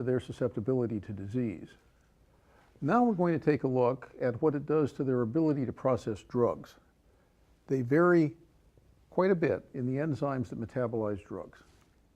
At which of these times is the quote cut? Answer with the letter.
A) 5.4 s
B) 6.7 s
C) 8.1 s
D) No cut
B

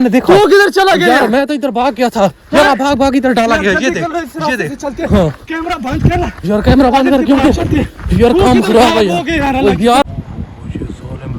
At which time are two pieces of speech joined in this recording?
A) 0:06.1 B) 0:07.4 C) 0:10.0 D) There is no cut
C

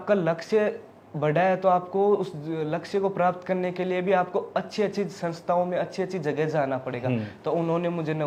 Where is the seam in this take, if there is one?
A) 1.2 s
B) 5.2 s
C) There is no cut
C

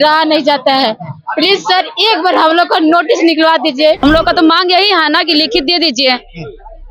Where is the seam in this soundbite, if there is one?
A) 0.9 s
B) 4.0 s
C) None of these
B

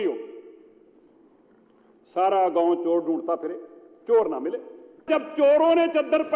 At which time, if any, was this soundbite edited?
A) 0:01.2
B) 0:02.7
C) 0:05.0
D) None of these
C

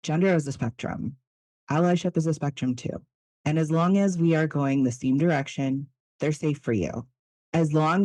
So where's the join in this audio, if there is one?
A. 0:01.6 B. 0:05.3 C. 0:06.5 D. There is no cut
D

